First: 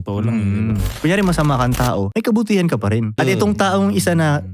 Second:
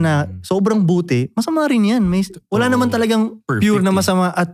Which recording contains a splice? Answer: first; 3 cuts; at 0.9 s, 2.1 s, 3.2 s

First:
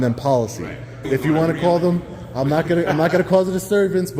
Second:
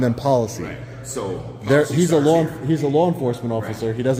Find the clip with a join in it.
first; 1 cut; at 1.1 s

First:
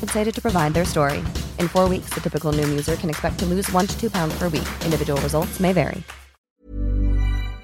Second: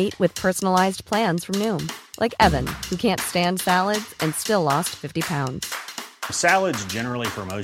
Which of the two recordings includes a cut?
first; 1 cut; at 6.6 s

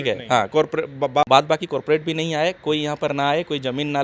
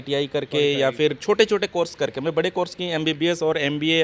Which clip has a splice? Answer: first; 1 cut; at 1.2 s

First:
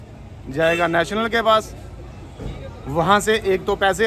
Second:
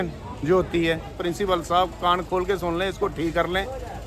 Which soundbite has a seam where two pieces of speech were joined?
second; 1 cut; at 1.2 s

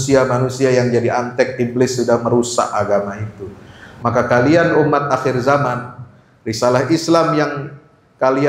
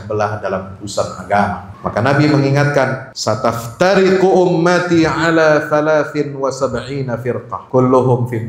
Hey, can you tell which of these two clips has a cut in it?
second; 3 cuts; at 1.7 s, 3.1 s, 7.6 s

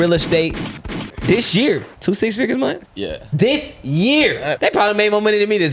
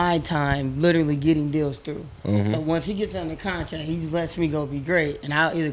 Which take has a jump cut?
first; 3 cuts; at 1.9 s, 2.9 s, 4.6 s

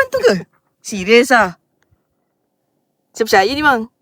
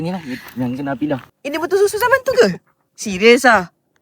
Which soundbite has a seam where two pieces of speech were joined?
second; 1 cut; at 1.2 s

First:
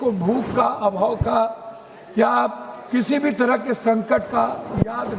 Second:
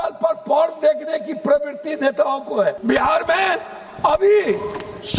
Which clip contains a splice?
second; 1 cut; at 2.8 s

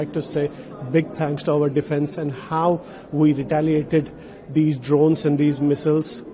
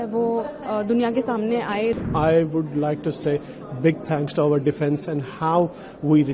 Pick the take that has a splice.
second; 1 cut; at 2.0 s

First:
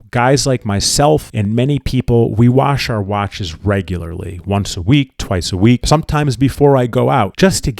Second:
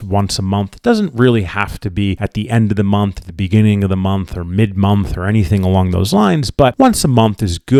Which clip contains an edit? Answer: first; 1 cut; at 5.8 s

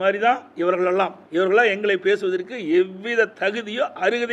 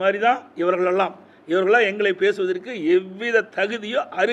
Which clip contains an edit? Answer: first; 1 cut; at 1.2 s

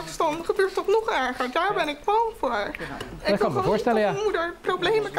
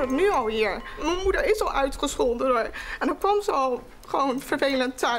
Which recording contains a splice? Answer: second; 1 cut; at 1.0 s

